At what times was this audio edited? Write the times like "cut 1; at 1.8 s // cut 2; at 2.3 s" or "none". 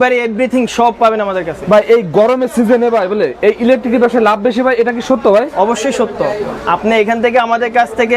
none

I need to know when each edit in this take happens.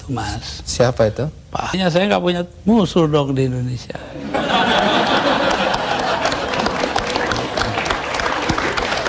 cut 1; at 1.8 s

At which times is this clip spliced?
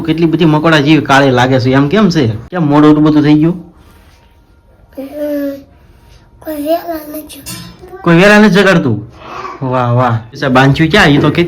cut 1; at 2.5 s // cut 2; at 10.4 s

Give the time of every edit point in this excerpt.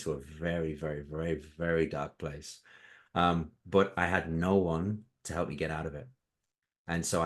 none

